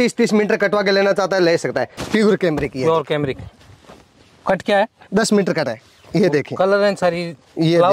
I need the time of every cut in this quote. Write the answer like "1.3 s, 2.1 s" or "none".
2.0 s